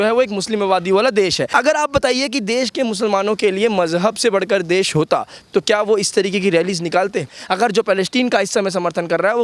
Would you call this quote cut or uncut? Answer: cut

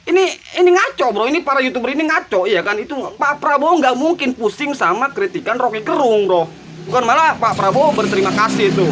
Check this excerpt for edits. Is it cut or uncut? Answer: cut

